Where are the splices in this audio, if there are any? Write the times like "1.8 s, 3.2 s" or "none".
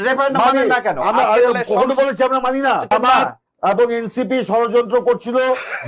2.9 s